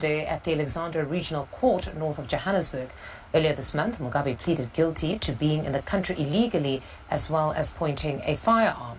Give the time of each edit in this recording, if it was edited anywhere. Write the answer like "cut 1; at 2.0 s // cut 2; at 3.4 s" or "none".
cut 1; at 3.2 s // cut 2; at 6.9 s

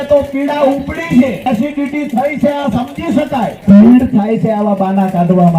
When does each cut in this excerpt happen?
cut 1; at 1.5 s // cut 2; at 3.5 s

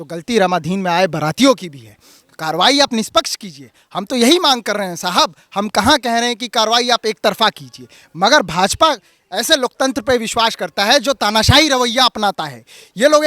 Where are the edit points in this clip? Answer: none

